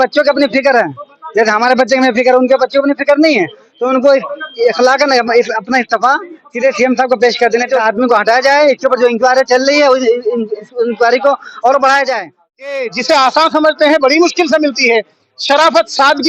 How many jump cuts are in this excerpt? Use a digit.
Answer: 2